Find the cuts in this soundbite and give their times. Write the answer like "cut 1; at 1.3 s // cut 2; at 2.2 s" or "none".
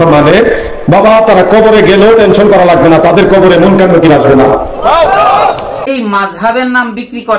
cut 1; at 5.8 s